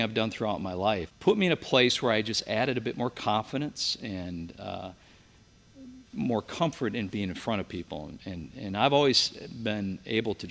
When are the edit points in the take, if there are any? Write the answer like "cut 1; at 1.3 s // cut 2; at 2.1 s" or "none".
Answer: cut 1; at 1.1 s